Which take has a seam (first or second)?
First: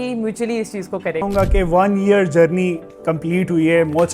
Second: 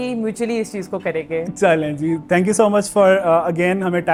first